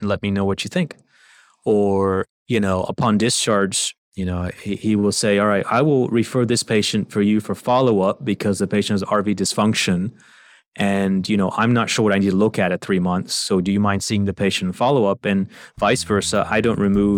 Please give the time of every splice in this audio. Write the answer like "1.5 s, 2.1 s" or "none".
none

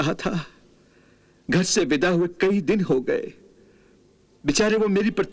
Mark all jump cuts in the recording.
none

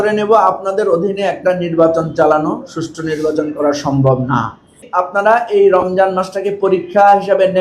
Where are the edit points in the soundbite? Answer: 4.8 s

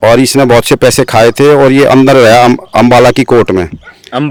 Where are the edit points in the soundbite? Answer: none

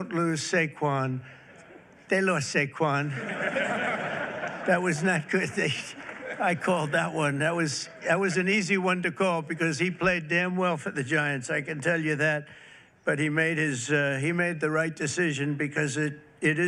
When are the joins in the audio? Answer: none

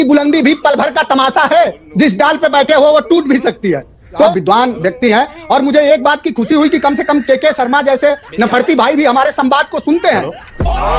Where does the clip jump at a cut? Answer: none

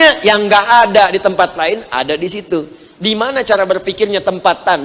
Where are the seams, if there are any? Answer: none

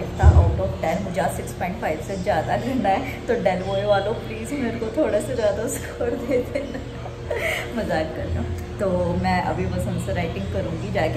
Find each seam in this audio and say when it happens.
none

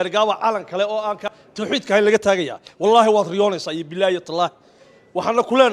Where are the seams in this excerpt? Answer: 1.3 s

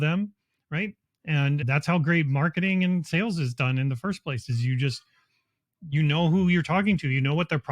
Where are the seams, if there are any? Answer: 1.6 s

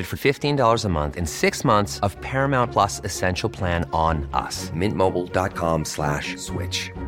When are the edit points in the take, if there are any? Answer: none

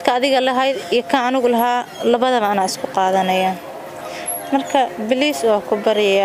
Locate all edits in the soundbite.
none

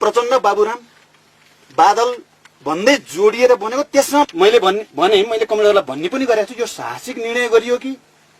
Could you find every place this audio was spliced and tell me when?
4.3 s

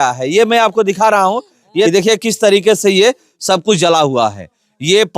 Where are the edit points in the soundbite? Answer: 1.9 s

